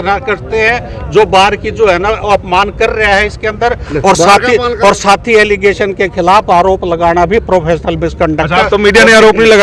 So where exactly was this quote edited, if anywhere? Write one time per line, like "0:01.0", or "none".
none